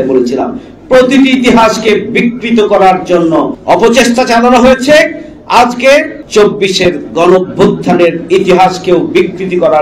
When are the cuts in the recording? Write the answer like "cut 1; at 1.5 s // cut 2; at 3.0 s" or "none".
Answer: cut 1; at 3.6 s // cut 2; at 6.2 s